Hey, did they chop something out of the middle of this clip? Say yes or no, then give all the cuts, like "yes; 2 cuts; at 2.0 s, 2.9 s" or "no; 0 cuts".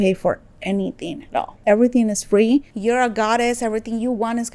no; 0 cuts